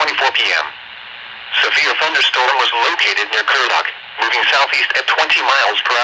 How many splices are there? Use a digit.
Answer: 1